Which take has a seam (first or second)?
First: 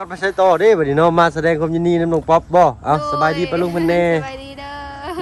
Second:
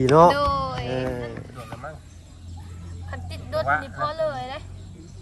second